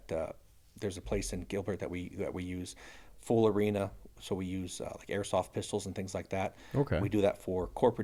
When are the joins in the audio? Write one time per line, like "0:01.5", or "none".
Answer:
none